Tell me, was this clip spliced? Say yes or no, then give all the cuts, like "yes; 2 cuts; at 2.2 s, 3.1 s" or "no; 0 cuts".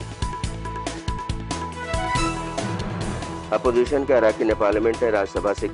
no; 0 cuts